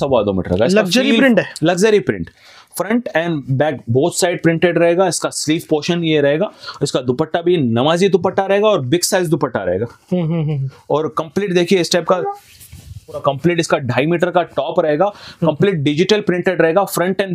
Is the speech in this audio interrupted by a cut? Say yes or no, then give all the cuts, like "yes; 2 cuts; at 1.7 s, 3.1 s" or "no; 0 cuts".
yes; 1 cut; at 13.2 s